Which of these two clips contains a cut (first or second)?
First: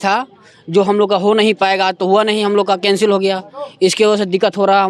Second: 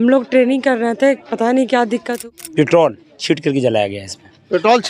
second